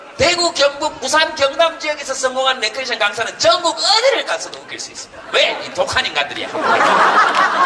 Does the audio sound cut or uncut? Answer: cut